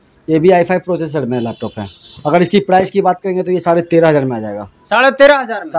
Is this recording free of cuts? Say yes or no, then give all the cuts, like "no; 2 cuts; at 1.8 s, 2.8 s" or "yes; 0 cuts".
yes; 0 cuts